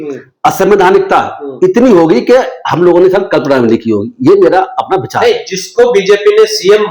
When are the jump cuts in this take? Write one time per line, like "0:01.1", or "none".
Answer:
none